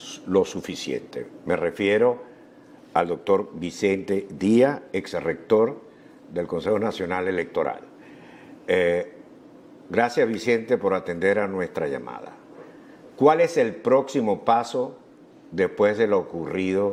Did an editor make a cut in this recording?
no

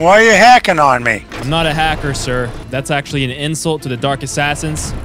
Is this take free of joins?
no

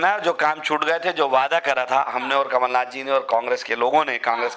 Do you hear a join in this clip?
no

